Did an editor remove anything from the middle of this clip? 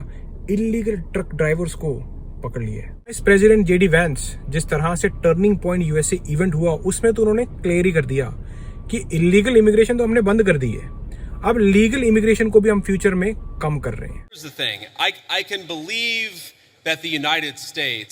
yes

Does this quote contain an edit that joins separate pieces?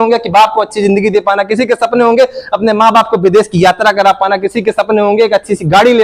no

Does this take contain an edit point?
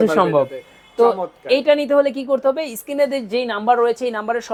no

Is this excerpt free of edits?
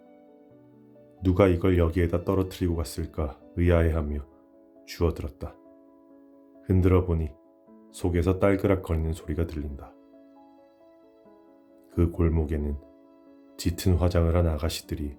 yes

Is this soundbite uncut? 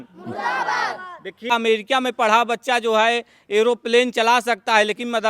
no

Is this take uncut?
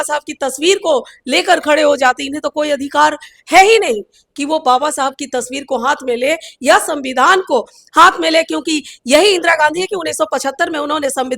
yes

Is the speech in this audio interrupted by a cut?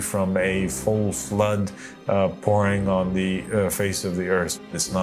no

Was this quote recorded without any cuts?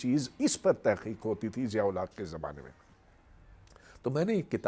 yes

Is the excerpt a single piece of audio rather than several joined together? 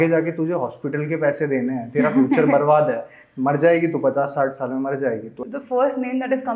no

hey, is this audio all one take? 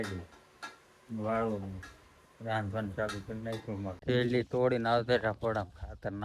no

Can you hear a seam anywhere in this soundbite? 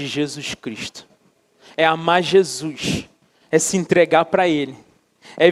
no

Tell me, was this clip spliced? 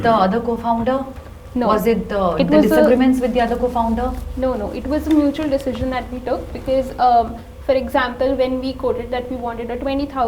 no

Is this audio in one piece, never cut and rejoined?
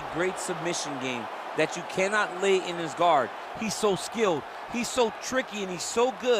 yes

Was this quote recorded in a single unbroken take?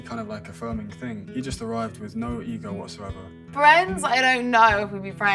no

